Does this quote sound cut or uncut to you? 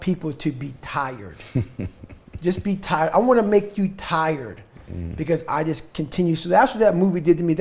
uncut